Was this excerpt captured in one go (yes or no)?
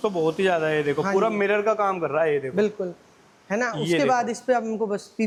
yes